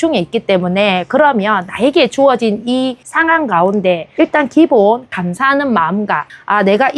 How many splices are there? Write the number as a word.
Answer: zero